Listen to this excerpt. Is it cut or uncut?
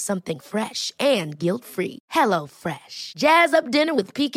uncut